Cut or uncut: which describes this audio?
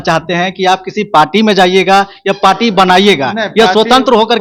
uncut